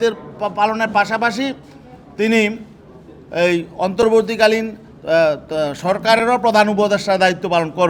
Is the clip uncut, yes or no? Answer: yes